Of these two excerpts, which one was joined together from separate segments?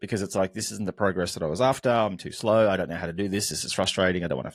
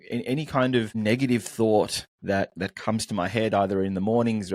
second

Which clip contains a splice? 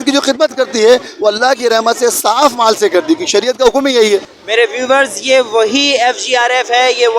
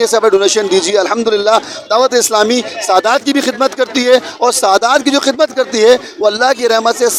first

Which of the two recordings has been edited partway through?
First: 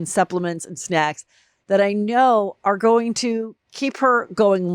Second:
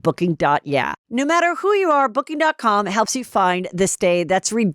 second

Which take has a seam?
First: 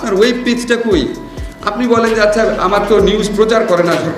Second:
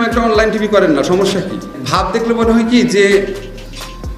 second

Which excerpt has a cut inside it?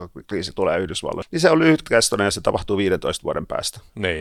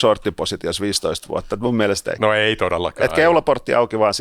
second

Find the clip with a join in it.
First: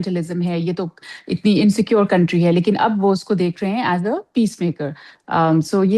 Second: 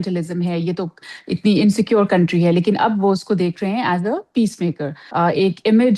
second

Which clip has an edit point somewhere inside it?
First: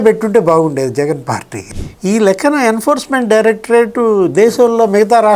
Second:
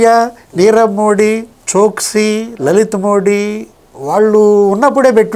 first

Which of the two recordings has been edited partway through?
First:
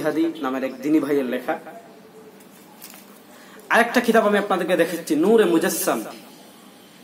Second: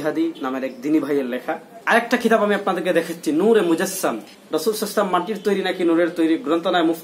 second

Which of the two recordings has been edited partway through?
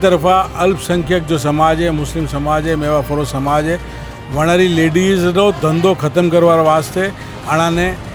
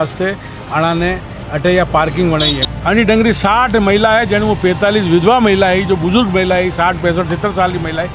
second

